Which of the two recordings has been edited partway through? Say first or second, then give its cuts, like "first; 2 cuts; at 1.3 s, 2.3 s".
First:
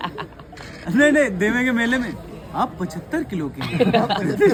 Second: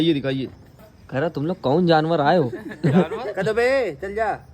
second; 1 cut; at 1.0 s